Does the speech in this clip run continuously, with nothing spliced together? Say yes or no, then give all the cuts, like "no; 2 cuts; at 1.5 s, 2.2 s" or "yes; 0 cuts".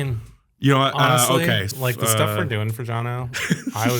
no; 1 cut; at 1.7 s